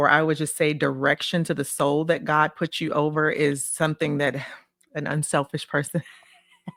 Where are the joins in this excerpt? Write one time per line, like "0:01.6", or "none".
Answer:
none